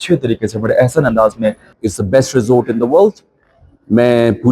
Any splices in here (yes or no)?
yes